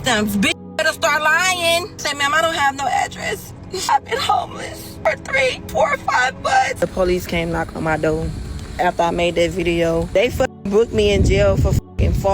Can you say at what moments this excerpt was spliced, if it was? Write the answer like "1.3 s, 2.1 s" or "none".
2.0 s, 3.9 s, 4.8 s, 5.6 s, 6.8 s, 10.1 s